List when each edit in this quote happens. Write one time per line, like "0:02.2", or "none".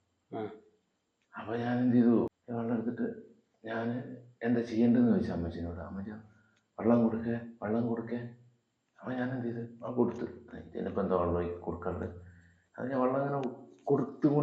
0:02.3